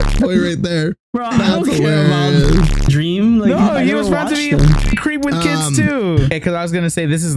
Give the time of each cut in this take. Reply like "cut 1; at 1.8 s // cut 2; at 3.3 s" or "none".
cut 1; at 6.4 s